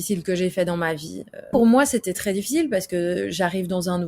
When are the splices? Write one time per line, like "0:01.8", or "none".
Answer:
0:01.5